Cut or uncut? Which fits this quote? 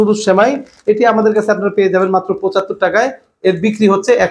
uncut